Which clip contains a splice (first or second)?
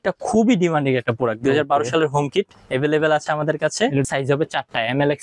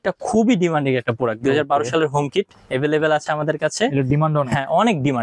first